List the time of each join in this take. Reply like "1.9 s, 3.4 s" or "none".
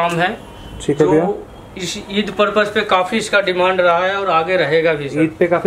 none